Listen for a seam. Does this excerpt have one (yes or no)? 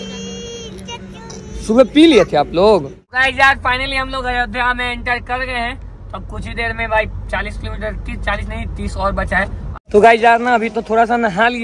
yes